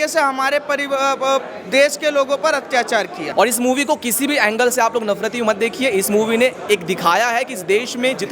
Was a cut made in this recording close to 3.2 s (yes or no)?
yes